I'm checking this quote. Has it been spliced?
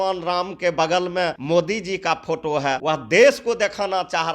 yes; 2 cuts; at 1.4 s, 2.8 s

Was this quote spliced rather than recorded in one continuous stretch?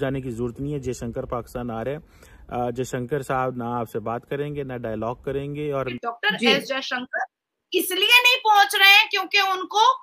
yes; 1 cut; at 5.9 s

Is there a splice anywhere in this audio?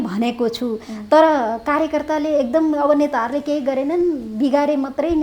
no; 0 cuts

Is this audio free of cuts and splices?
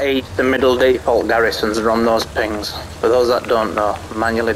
yes; 0 cuts

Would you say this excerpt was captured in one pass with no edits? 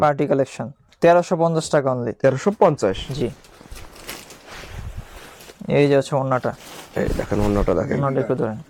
yes; 0 cuts

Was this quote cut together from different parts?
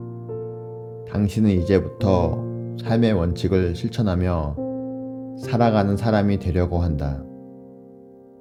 no; 0 cuts

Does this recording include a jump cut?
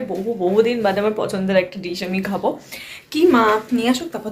no; 0 cuts

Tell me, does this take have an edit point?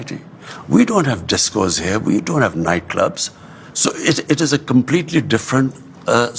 no; 0 cuts

